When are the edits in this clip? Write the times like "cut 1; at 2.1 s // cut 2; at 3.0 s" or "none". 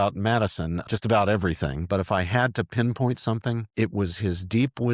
cut 1; at 0.9 s // cut 2; at 1.8 s // cut 3; at 3.7 s